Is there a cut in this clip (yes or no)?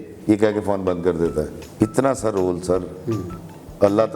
yes